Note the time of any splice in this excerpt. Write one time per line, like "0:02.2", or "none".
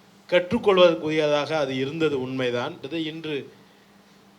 0:02.8